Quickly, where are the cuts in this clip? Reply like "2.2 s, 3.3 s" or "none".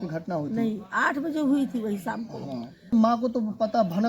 2.9 s